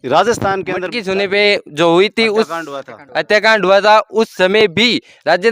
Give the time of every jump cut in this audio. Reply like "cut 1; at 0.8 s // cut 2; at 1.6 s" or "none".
cut 1; at 0.9 s

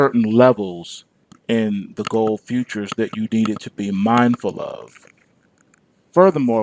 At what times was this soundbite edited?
cut 1; at 2.4 s

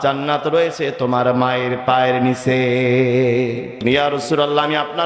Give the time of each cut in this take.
cut 1; at 3.7 s

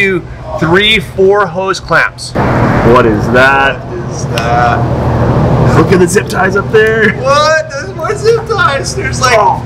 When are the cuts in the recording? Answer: cut 1; at 2.3 s

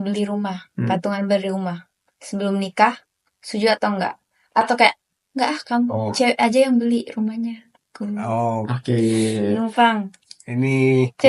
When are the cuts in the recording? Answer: none

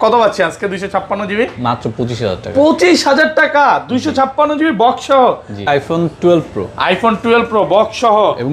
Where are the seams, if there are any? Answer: cut 1; at 5.7 s

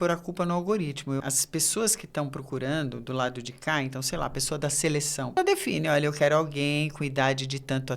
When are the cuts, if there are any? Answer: cut 1; at 1.2 s // cut 2; at 5.4 s

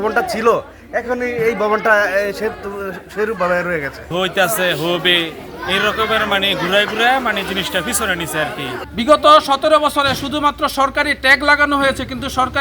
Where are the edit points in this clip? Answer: cut 1; at 4.1 s // cut 2; at 8.8 s

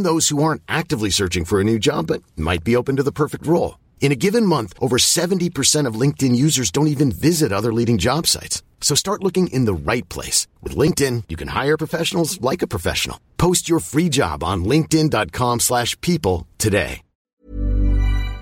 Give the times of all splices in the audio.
cut 1; at 17.4 s

